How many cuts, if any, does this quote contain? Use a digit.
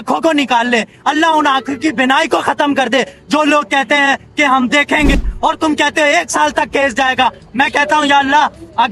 0